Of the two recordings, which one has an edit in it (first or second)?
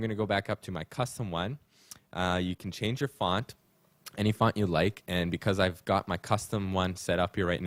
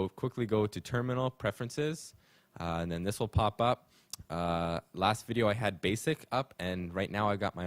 second